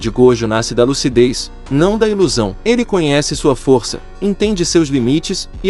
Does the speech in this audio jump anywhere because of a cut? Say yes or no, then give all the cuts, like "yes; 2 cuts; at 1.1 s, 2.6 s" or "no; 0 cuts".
yes; 1 cut; at 2.6 s